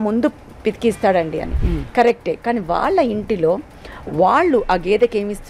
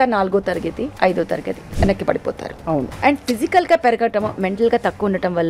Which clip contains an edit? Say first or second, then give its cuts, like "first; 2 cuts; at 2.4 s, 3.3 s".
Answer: second; 3 cuts; at 0.9 s, 1.6 s, 2.9 s